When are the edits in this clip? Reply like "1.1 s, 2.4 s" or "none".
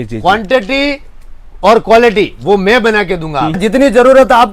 3.6 s